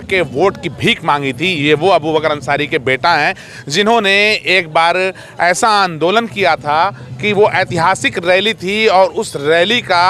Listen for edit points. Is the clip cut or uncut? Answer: uncut